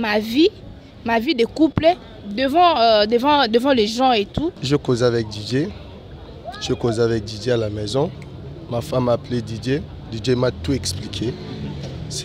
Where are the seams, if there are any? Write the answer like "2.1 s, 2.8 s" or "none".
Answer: 4.6 s

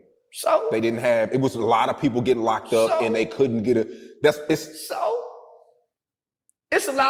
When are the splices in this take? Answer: none

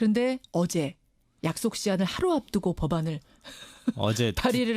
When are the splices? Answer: 3.5 s

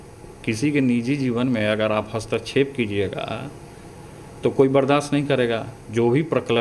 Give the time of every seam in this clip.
none

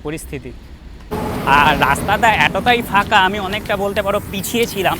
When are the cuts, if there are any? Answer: 1.1 s

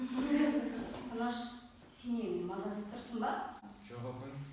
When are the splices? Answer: 3.6 s

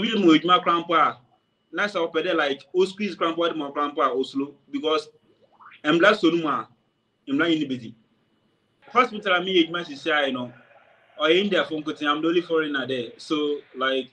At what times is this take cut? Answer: 8.8 s

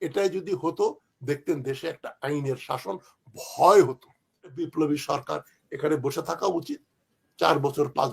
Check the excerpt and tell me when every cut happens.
4.7 s

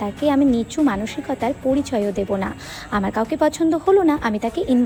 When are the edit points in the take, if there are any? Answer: none

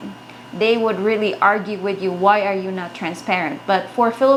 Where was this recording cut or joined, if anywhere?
none

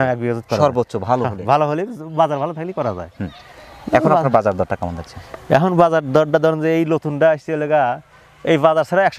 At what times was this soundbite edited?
none

